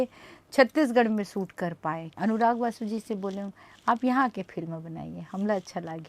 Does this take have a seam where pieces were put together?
yes; 1 cut; at 2.1 s

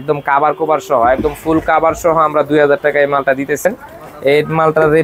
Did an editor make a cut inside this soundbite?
yes; 1 cut; at 3.6 s

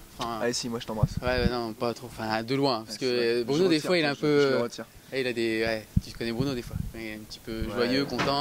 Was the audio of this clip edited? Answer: no; 0 cuts

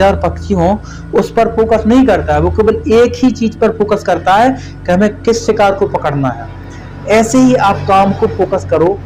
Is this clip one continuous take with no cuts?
yes; 0 cuts

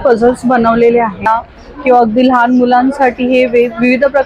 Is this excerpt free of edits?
no; 1 cut; at 1.2 s

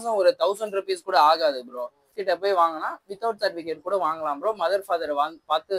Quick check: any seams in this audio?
yes; 1 cut; at 2.2 s

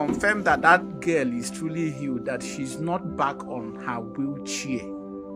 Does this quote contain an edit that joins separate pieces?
no; 0 cuts

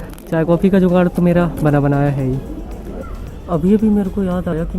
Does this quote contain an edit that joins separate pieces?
no; 0 cuts

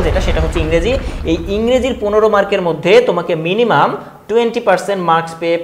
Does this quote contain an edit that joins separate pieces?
no; 0 cuts

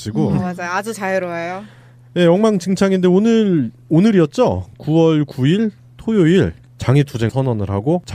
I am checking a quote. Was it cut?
no; 0 cuts

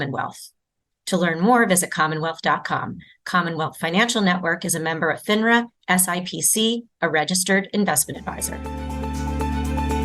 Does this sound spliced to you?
yes; 1 cut; at 8.6 s

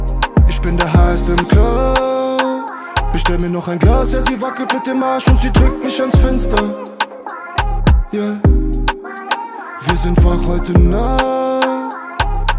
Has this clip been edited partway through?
no; 0 cuts

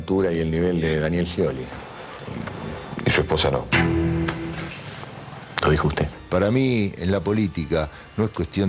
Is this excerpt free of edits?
no; 1 cut; at 6.1 s

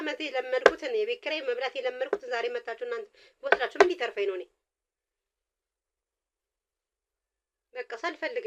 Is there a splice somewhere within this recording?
no; 0 cuts

